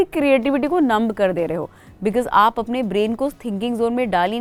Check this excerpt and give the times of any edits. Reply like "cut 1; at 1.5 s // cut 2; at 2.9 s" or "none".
none

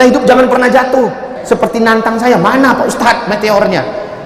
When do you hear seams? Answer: cut 1; at 1.3 s

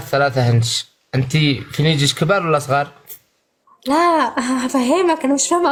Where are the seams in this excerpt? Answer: none

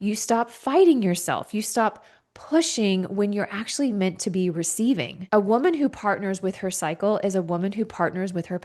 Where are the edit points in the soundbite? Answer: cut 1; at 5.1 s

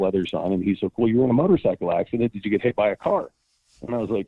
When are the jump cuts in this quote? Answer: none

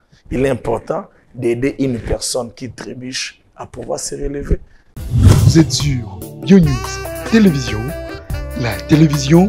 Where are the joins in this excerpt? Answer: cut 1; at 4.9 s

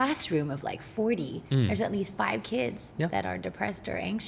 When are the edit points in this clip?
none

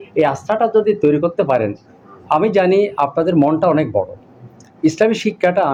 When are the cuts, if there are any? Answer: none

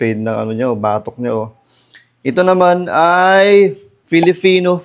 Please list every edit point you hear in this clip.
none

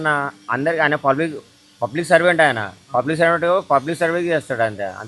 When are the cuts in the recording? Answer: none

